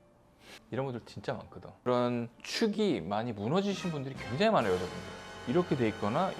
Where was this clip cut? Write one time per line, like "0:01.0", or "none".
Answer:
0:01.9